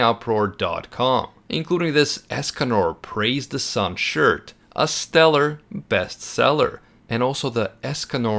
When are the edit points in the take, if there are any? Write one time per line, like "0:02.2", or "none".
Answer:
none